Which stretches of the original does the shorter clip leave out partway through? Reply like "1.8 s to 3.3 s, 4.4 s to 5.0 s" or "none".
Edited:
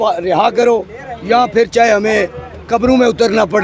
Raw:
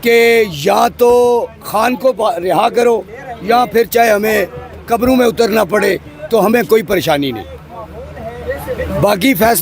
none